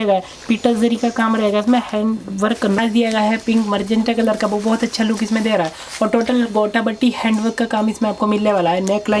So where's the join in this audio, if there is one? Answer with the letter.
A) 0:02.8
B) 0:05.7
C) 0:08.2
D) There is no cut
A